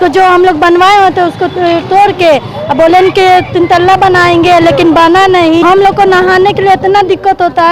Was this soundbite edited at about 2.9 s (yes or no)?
no